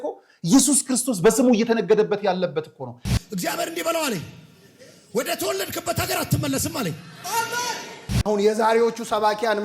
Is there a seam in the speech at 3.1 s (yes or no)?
yes